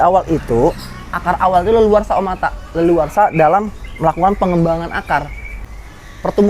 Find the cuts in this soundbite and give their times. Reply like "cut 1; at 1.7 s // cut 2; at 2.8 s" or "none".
cut 1; at 5.5 s